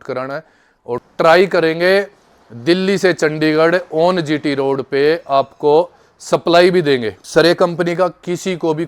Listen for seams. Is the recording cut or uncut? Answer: cut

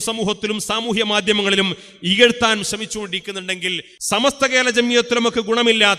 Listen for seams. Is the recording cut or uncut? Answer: cut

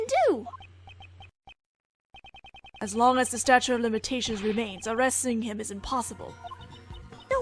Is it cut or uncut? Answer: uncut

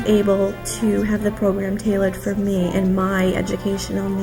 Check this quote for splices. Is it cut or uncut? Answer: uncut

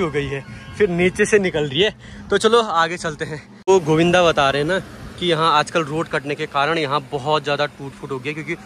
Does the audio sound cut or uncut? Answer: cut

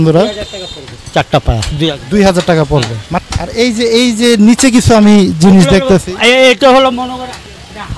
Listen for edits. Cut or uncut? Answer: cut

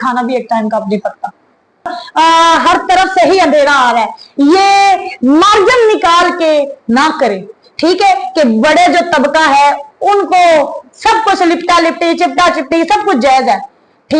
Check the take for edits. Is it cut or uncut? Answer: cut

